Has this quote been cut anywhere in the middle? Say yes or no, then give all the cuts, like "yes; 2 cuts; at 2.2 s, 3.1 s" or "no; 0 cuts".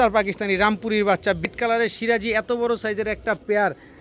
yes; 1 cut; at 1.5 s